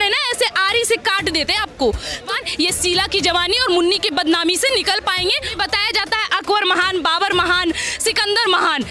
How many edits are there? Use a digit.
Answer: 2